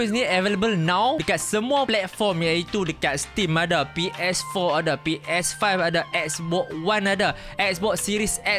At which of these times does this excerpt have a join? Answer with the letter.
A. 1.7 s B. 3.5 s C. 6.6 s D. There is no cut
A